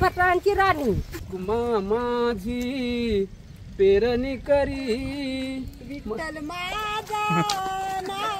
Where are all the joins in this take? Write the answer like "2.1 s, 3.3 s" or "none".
1.1 s